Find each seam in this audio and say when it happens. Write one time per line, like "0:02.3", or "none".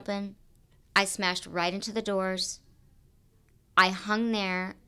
none

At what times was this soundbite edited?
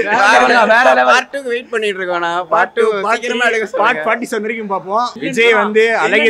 0:05.2

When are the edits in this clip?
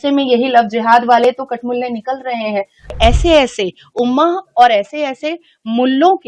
0:02.9

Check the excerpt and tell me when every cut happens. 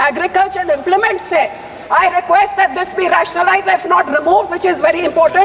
0:01.7

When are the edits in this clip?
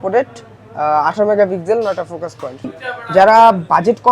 0:02.7

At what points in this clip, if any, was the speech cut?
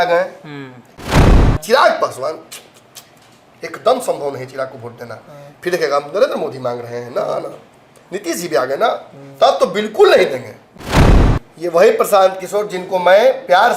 0:01.2
0:11.2

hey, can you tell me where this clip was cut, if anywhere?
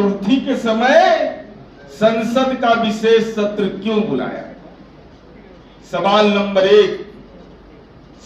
none

